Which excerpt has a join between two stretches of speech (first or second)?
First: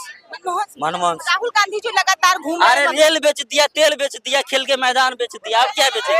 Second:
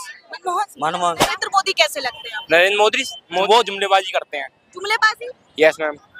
second